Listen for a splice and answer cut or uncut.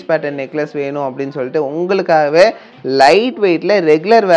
uncut